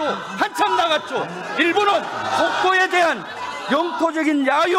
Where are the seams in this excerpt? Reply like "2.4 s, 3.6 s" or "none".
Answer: none

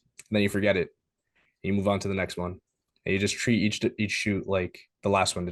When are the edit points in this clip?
none

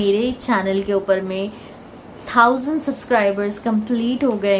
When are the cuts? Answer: none

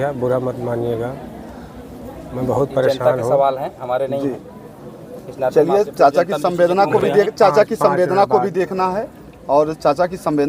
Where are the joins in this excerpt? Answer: none

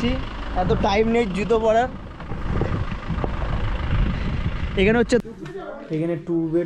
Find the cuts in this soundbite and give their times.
5.2 s

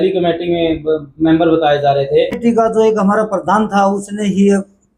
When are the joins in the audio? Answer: 2.4 s

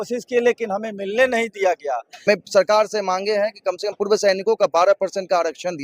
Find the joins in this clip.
2.3 s

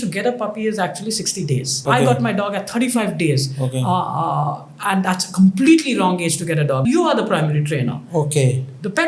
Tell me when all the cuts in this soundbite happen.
1.8 s, 6.8 s

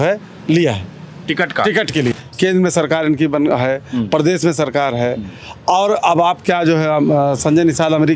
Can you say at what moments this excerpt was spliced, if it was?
2.2 s

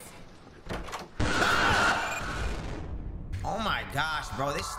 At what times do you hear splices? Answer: none

